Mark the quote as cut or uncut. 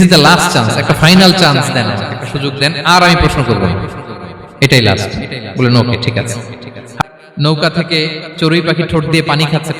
cut